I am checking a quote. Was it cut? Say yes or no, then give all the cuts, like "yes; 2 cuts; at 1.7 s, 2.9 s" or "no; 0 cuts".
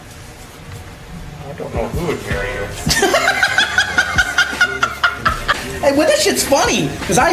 no; 0 cuts